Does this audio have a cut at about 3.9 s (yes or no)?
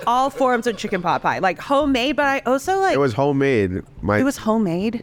no